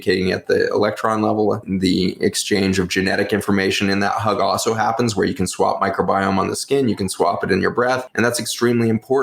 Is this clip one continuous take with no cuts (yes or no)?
yes